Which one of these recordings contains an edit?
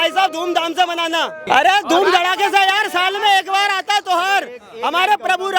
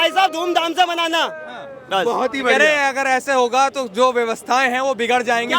first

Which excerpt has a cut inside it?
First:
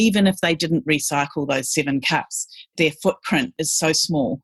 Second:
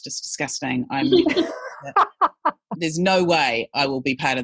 second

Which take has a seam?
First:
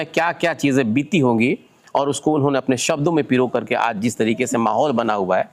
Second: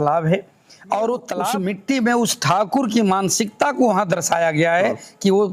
second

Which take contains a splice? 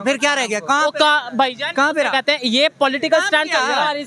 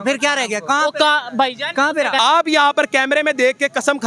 second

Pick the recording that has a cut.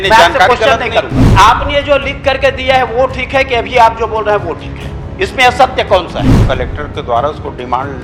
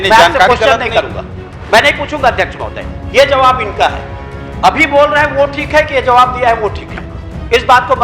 first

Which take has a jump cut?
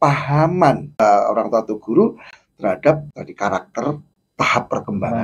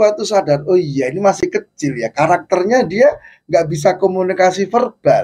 first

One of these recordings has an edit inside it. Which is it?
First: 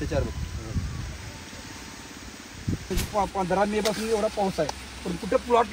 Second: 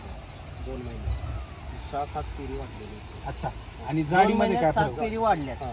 first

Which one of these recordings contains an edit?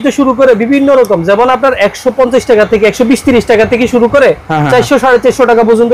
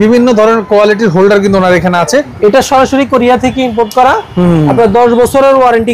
second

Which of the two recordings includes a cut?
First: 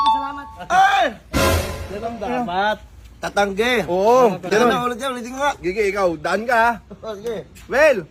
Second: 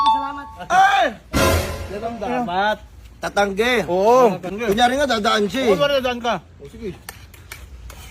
second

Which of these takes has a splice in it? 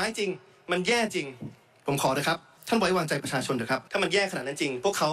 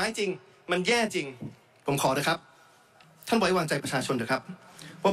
first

